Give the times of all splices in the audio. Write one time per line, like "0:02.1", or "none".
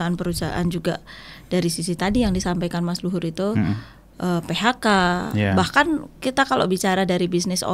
none

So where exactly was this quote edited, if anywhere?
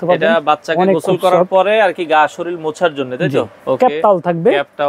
0:03.6

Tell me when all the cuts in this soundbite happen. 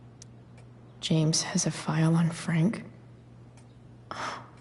0:01.0

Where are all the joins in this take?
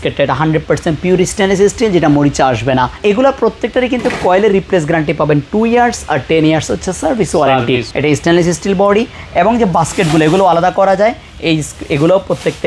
0:03.0
0:07.9

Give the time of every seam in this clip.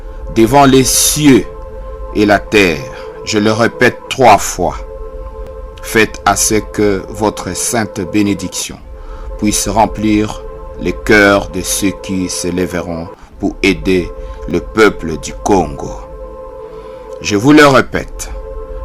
0:15.9
0:17.2

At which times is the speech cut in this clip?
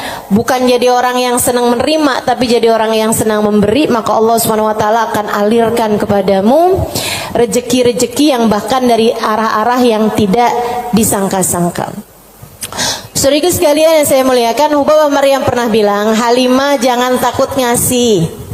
none

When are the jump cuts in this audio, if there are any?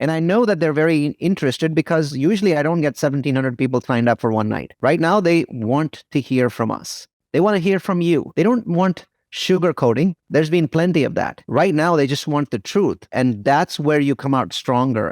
0:13.1

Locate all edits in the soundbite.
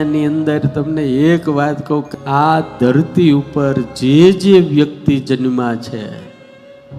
0:02.1

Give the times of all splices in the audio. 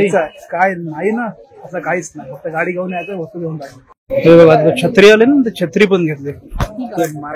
0:04.0

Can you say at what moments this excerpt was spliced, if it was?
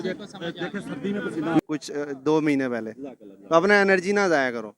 0:01.6

